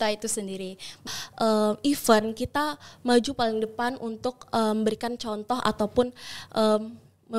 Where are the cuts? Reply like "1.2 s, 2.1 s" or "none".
1.1 s